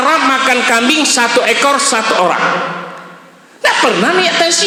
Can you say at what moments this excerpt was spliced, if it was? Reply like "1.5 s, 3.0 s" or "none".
none